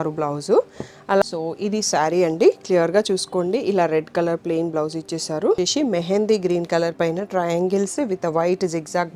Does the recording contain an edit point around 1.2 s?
yes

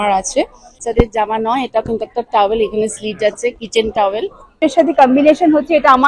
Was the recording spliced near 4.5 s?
yes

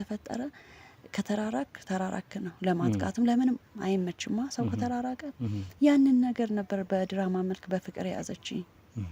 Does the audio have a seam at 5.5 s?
no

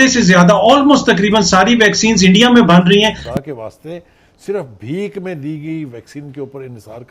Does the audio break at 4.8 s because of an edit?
no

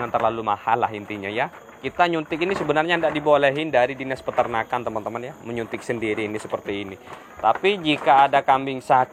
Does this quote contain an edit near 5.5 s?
no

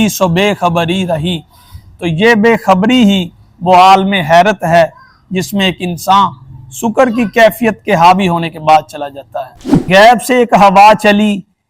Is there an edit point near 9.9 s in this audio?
yes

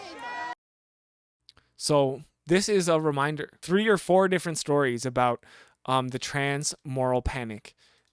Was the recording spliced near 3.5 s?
yes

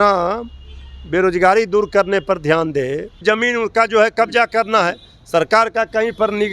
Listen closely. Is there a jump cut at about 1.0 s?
no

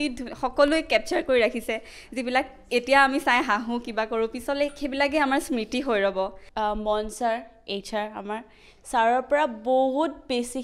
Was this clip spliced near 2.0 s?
no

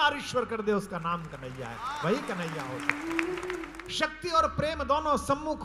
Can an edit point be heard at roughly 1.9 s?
no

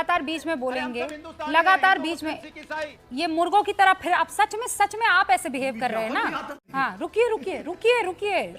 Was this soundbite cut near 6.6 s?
yes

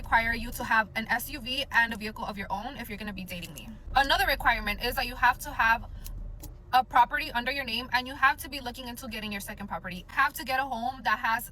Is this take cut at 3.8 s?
no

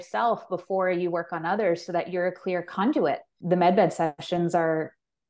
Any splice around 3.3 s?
yes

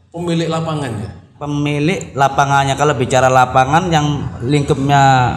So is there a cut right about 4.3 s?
no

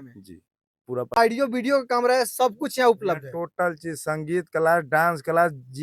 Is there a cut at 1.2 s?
yes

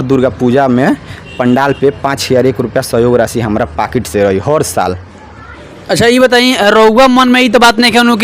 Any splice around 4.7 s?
no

